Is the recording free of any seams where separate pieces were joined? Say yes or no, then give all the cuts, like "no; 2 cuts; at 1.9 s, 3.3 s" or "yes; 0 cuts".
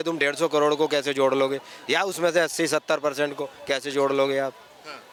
yes; 0 cuts